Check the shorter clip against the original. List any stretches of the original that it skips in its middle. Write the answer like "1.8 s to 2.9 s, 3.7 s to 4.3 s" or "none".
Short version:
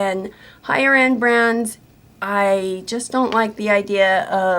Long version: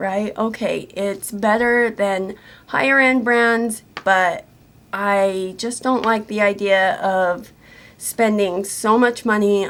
3.9 s to 4.5 s